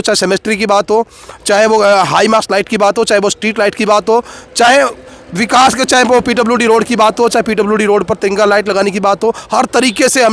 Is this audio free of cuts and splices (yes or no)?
yes